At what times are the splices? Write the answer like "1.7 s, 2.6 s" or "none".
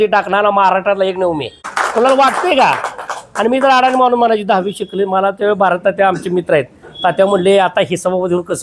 1.7 s